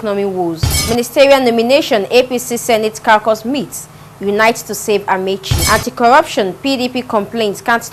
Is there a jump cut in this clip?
no; 0 cuts

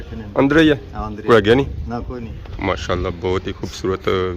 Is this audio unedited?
no; 1 cut; at 2.4 s

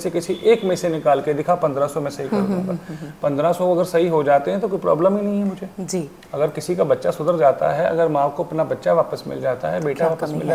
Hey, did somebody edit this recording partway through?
no; 0 cuts

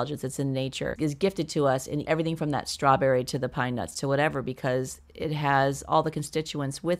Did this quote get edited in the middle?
yes; 1 cut; at 1.0 s

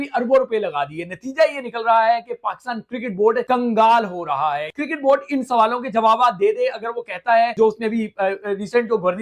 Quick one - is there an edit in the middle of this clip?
no; 0 cuts

